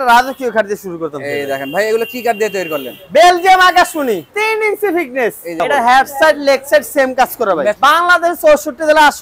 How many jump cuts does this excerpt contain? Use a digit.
3